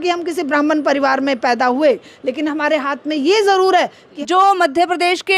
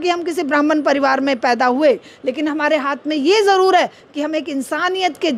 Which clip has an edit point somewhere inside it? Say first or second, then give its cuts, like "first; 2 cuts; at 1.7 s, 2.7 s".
first; 1 cut; at 4.1 s